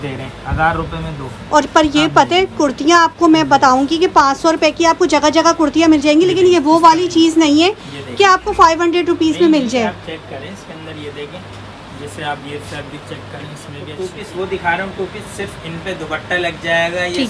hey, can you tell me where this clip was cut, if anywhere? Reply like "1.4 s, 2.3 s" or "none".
13.9 s